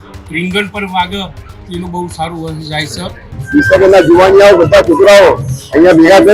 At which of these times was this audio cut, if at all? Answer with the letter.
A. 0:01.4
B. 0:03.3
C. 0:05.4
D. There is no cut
B